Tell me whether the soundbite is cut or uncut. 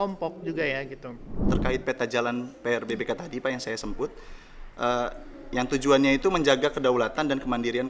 cut